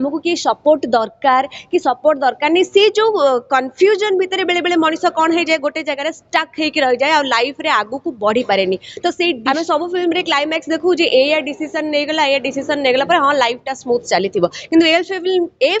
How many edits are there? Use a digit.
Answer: 1